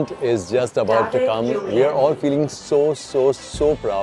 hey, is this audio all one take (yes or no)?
yes